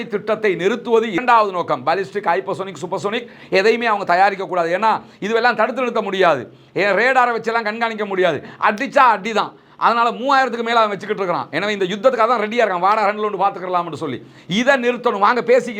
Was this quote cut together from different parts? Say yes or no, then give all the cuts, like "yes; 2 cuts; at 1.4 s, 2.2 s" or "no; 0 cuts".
no; 0 cuts